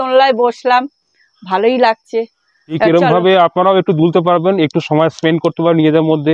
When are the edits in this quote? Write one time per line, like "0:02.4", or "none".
0:02.8